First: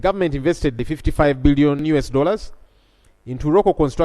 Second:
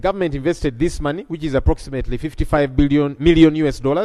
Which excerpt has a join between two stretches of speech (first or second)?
first